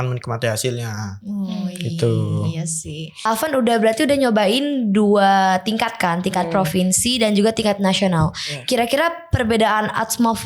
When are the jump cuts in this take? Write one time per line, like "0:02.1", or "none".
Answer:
0:03.2